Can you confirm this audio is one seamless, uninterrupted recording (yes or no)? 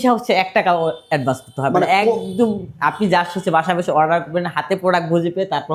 yes